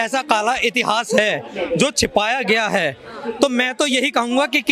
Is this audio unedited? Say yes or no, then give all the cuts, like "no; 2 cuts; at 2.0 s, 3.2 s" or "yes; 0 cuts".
yes; 0 cuts